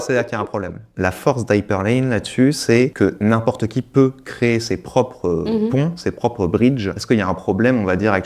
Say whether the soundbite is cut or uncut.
cut